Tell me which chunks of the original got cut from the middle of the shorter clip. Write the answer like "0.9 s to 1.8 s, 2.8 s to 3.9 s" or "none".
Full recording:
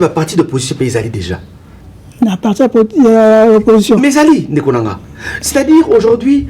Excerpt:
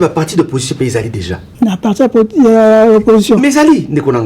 1.4 s to 2.0 s